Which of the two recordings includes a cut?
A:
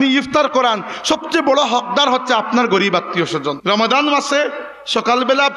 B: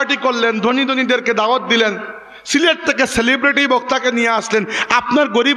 A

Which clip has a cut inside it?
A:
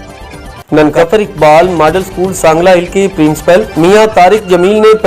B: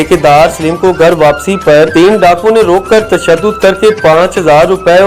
A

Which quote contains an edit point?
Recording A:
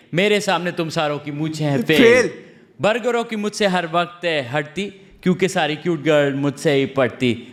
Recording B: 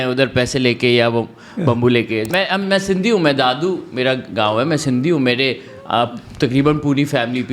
B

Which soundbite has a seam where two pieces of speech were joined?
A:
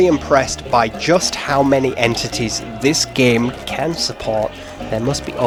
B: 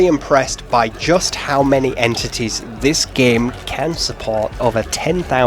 B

